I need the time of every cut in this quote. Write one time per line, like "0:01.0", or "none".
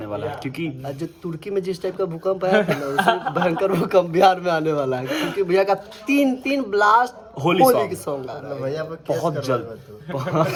none